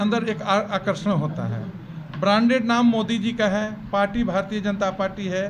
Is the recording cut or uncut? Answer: uncut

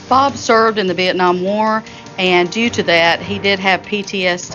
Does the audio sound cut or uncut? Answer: uncut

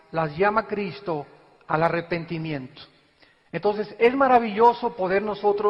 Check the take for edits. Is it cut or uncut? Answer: uncut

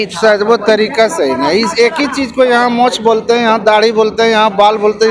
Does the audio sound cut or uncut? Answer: uncut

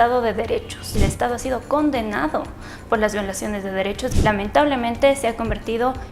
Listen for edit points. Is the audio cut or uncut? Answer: cut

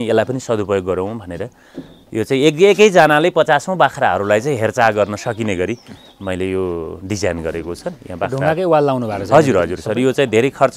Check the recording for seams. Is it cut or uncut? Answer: uncut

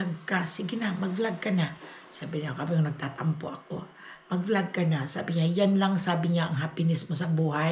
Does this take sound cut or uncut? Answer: uncut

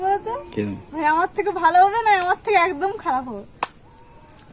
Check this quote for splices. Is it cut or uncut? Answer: uncut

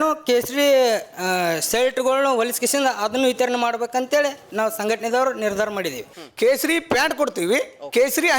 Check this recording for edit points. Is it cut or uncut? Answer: cut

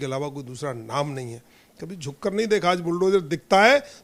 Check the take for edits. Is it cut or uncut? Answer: uncut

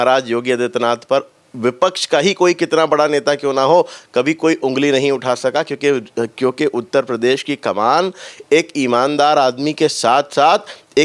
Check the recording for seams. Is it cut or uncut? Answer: uncut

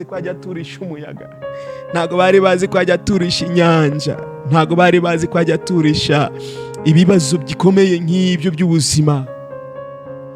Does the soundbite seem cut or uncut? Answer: uncut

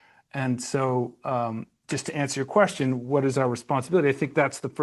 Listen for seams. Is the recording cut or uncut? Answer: uncut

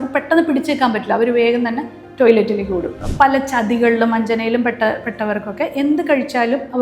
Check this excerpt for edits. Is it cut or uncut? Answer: cut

